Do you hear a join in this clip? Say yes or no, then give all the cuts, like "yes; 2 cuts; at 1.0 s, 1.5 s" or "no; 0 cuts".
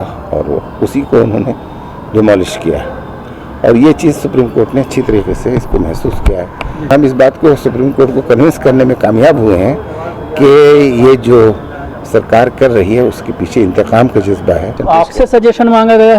yes; 2 cuts; at 6.9 s, 14.7 s